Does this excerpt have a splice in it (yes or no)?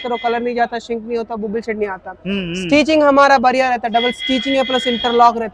no